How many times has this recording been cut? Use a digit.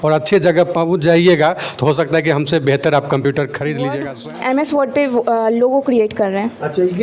1